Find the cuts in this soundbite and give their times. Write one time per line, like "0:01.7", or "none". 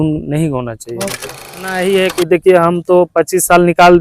0:01.8